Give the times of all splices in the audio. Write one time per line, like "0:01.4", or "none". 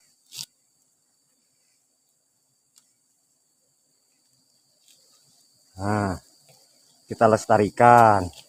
none